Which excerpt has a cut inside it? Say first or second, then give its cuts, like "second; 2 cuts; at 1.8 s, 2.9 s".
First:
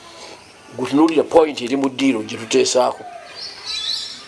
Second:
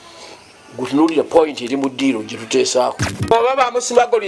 second; 1 cut; at 3.3 s